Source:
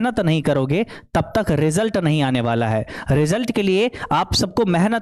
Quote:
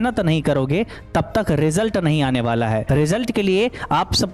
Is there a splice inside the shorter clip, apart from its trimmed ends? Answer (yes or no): yes